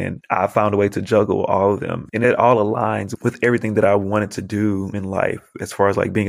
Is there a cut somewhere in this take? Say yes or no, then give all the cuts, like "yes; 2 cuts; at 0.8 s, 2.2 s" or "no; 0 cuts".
yes; 2 cuts; at 2.0 s, 3.1 s